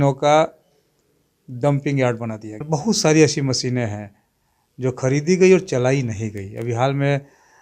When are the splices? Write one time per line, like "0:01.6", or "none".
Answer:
0:02.5